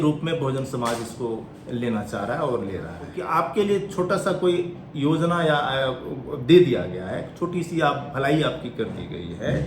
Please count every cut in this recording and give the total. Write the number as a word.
one